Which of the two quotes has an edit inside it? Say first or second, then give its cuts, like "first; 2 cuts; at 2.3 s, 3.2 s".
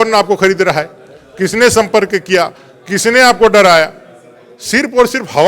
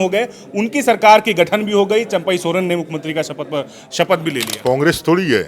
second; 1 cut; at 4.5 s